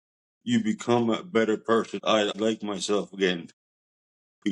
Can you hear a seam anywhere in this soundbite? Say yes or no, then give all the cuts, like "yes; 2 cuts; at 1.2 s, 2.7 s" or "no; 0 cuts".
yes; 1 cut; at 2.3 s